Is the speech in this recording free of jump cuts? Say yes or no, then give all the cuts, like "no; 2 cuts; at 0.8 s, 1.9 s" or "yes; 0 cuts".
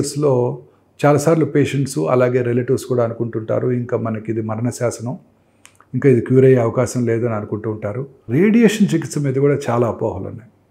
no; 1 cut; at 8.2 s